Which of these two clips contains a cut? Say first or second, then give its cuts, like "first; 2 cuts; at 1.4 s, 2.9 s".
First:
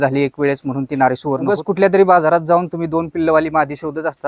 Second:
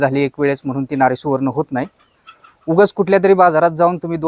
first; 1 cut; at 1.5 s